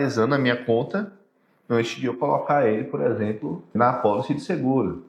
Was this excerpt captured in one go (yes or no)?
no